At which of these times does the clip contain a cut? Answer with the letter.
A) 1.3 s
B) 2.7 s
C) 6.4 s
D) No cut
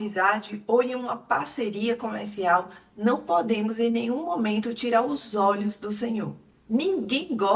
C